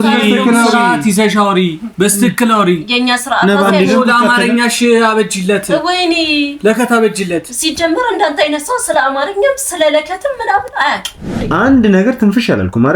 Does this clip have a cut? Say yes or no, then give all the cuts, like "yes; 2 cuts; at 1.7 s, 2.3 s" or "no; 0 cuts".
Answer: yes; 1 cut; at 11.4 s